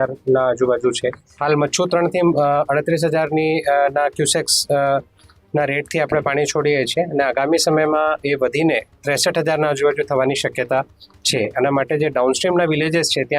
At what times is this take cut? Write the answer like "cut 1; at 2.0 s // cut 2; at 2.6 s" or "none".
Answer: cut 1; at 1.3 s